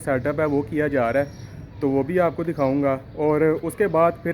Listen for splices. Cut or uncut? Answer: uncut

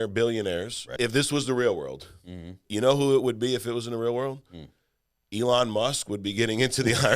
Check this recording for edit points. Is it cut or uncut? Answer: cut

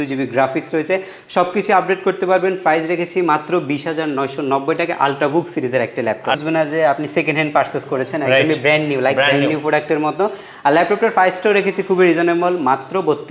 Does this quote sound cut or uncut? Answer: cut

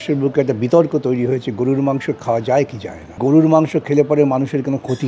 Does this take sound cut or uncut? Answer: cut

